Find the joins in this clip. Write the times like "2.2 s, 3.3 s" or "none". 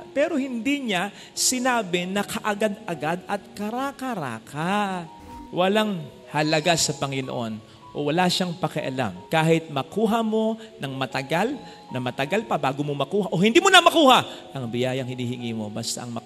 5.4 s